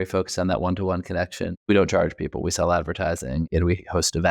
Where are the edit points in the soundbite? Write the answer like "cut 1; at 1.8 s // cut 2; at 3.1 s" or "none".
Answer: cut 1; at 1.6 s // cut 2; at 3.5 s